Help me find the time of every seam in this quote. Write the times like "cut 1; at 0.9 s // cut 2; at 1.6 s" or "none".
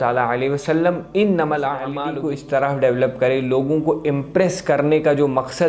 cut 1; at 2.0 s